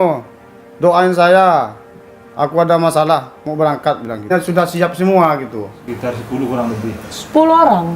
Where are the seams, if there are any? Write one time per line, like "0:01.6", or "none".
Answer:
0:04.3